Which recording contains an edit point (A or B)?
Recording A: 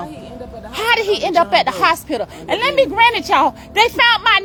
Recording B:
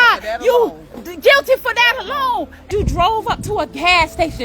B